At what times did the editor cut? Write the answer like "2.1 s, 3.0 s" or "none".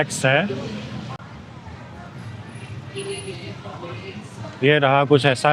1.2 s